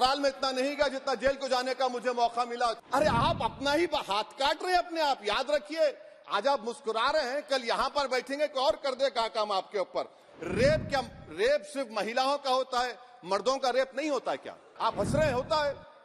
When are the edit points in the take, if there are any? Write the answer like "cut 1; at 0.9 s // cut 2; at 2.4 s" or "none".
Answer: cut 1; at 2.8 s // cut 2; at 10.3 s // cut 3; at 14.7 s